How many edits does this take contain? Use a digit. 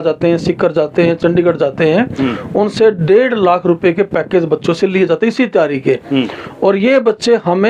0